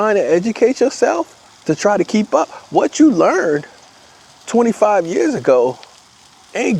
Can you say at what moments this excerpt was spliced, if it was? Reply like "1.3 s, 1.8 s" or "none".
none